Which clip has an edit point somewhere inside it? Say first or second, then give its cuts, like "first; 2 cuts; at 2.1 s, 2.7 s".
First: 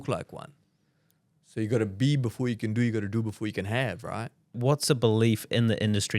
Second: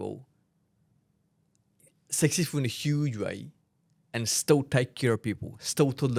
first; 1 cut; at 4.6 s